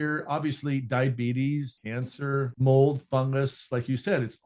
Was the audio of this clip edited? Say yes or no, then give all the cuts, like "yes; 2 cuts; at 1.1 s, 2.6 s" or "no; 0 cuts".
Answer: no; 0 cuts